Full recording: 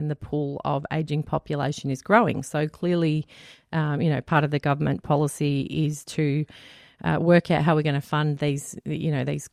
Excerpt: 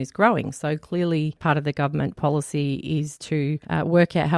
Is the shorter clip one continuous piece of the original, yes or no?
no